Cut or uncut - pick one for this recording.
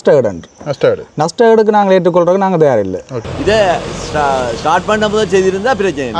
cut